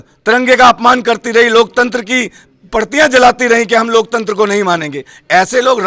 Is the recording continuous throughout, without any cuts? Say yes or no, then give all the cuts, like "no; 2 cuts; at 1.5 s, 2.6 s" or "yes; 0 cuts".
yes; 0 cuts